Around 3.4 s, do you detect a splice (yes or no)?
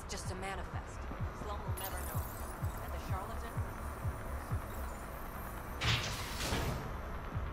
no